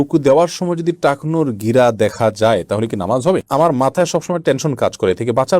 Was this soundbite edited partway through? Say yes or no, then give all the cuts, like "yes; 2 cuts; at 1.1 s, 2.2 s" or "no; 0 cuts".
yes; 1 cut; at 3.4 s